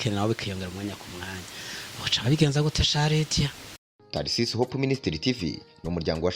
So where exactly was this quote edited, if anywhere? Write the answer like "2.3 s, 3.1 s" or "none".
3.9 s